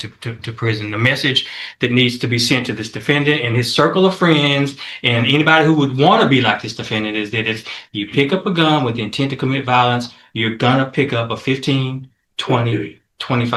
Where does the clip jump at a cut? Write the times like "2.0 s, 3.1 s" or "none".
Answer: none